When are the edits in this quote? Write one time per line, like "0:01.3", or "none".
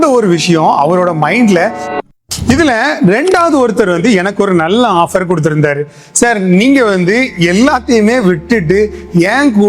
0:01.9